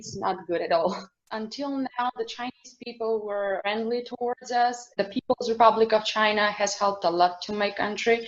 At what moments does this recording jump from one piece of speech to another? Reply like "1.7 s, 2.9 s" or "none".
1.2 s, 4.9 s